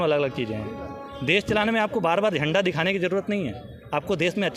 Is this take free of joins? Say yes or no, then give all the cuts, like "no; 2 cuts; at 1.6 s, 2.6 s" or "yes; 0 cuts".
yes; 0 cuts